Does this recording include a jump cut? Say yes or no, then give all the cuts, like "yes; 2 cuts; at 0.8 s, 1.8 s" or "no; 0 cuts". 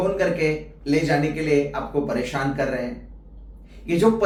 no; 0 cuts